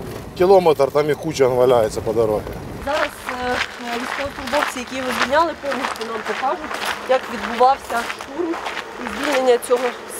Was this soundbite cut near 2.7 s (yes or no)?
yes